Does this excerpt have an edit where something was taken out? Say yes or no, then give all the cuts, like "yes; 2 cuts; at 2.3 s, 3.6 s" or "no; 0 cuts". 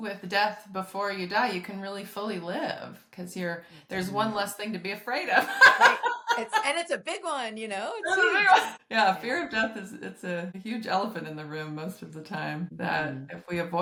no; 0 cuts